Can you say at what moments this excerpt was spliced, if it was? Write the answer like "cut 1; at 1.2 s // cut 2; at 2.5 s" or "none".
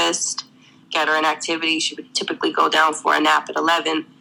none